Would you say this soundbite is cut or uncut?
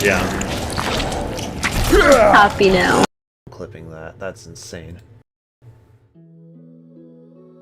uncut